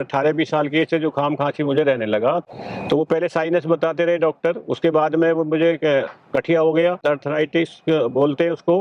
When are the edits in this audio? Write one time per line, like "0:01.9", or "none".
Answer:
0:02.4